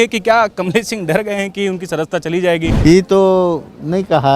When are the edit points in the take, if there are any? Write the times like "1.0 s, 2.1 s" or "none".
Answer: 2.8 s